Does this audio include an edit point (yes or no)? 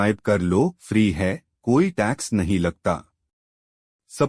no